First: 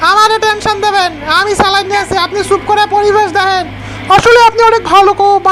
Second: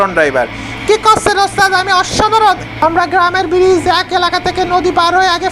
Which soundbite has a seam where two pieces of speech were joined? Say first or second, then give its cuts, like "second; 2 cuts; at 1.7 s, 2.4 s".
second; 1 cut; at 2.7 s